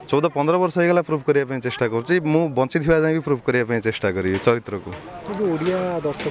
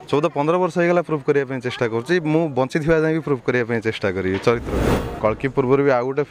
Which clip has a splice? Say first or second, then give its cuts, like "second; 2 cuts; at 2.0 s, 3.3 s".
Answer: second; 1 cut; at 5.2 s